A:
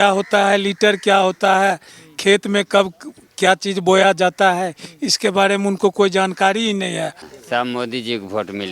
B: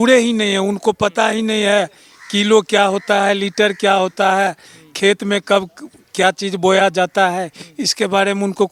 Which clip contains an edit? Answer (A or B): A